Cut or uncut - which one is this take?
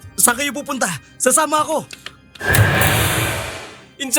uncut